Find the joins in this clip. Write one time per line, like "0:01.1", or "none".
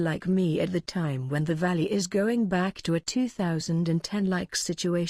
0:00.9